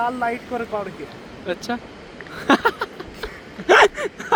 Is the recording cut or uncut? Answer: uncut